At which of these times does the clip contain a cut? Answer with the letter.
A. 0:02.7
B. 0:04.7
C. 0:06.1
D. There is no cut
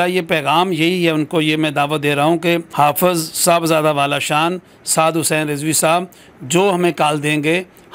A